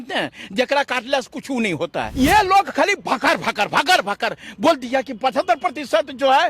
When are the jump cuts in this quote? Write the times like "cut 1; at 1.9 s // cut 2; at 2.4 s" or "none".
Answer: cut 1; at 2.1 s